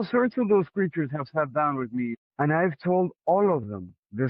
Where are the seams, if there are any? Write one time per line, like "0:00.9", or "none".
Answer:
0:02.2